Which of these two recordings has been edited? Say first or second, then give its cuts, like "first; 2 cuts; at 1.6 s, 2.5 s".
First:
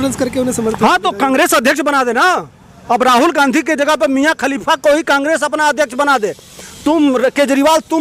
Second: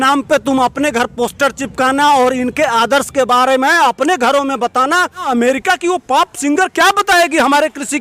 second; 1 cut; at 5.2 s